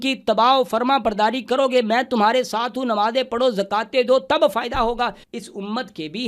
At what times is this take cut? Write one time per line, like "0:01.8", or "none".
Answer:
0:05.2